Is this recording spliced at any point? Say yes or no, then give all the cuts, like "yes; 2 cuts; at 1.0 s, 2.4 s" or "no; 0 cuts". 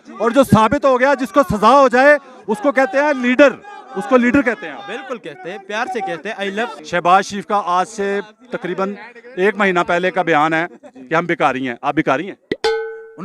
yes; 1 cut; at 6.8 s